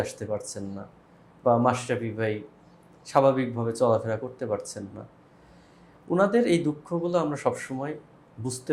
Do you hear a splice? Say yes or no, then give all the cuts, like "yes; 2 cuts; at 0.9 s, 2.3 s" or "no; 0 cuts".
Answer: no; 0 cuts